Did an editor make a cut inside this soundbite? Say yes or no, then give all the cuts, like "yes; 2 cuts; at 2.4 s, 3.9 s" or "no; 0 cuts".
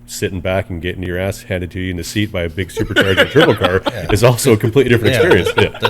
yes; 1 cut; at 1.0 s